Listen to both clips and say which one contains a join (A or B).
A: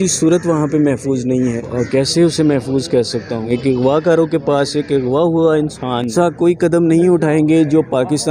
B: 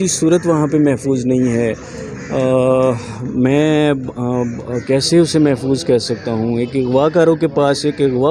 A